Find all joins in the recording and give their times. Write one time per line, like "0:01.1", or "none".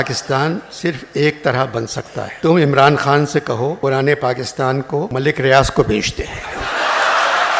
0:02.3
0:03.8
0:05.1